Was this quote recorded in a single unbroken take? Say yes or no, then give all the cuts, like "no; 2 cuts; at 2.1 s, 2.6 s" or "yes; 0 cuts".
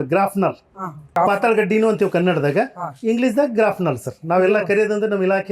no; 1 cut; at 1.1 s